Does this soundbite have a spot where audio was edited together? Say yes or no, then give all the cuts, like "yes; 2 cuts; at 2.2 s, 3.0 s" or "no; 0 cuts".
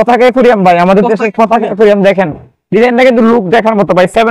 no; 0 cuts